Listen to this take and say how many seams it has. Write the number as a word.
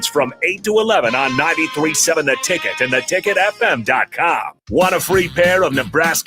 one